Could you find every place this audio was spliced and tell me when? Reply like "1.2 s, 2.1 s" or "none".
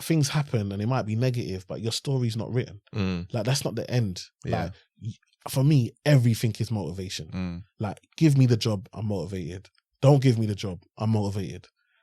none